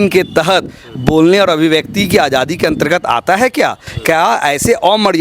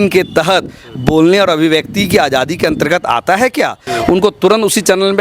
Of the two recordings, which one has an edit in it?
second; 1 cut; at 3.8 s

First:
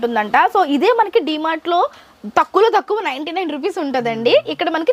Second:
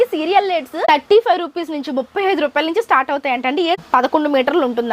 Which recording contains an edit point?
second; 2 cuts; at 0.8 s, 3.8 s

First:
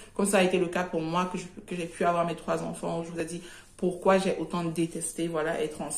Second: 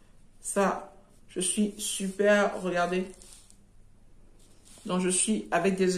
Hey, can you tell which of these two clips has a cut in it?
first; 1 cut; at 3.2 s

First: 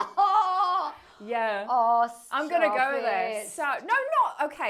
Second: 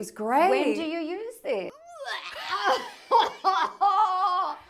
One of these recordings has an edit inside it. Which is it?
second; 1 cut; at 1.7 s

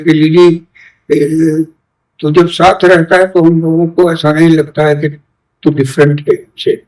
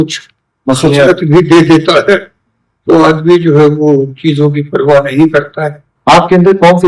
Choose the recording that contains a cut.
second; 1 cut; at 5.8 s

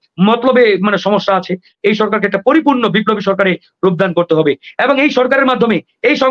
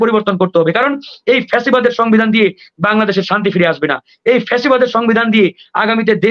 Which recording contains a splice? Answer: first; 1 cut; at 1.7 s

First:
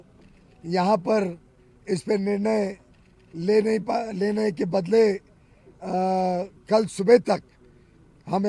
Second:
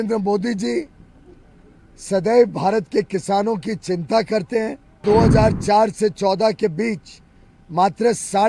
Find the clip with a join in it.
second; 1 cut; at 5.0 s

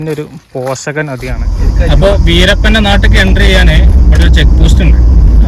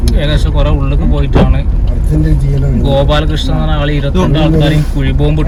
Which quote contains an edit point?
first; 1 cut; at 1.5 s

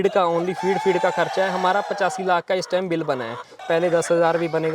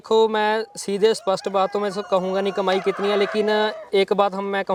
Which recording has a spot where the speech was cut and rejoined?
first; 1 cut; at 3.6 s

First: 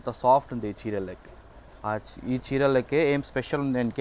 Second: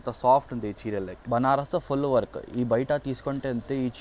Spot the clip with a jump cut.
second; 1 cut; at 1.1 s

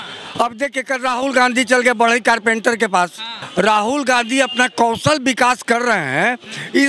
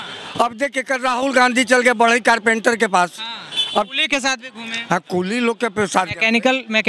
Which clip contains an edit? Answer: first; 1 cut; at 3.3 s

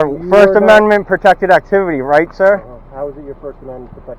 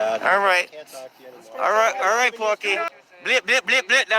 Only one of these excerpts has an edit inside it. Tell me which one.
second; 1 cut; at 3.1 s

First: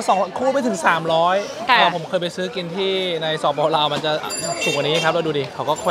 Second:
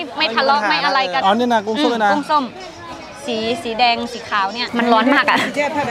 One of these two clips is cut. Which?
second; 2 cuts; at 1.2 s, 4.6 s

